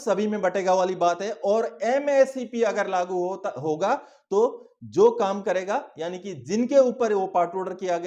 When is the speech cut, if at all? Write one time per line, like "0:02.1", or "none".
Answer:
none